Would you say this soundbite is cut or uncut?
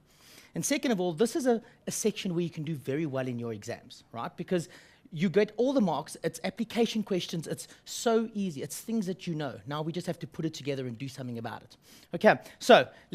uncut